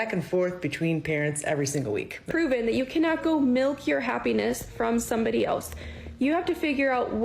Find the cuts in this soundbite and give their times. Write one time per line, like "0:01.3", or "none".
0:02.2